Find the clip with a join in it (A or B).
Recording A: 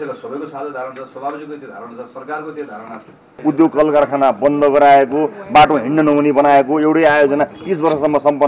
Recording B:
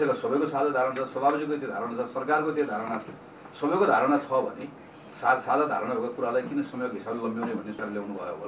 A